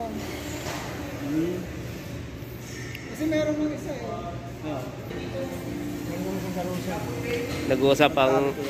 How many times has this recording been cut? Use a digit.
0